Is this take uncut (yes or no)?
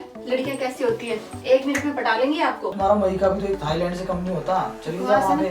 no